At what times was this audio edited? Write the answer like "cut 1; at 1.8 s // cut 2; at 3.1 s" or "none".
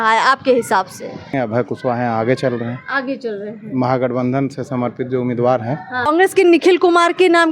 cut 1; at 1.3 s // cut 2; at 6.1 s